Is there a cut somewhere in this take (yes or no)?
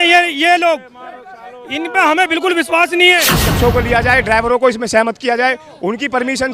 yes